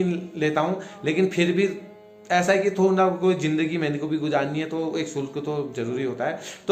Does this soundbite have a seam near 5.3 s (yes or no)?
no